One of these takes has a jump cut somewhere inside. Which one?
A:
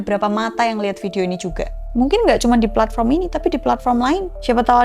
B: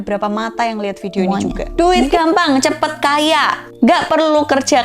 B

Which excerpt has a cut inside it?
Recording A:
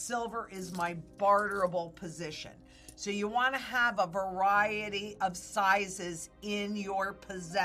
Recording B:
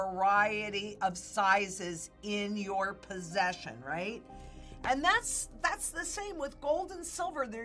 B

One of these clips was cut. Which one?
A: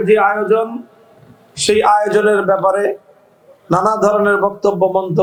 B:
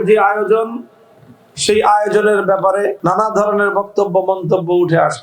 B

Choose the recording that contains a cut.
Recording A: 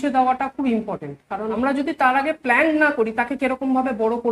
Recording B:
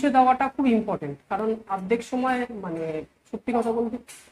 A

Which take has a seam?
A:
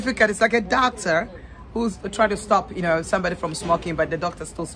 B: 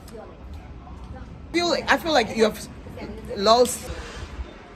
B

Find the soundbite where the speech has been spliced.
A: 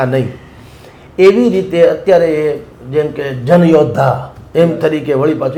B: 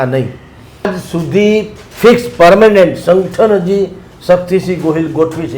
B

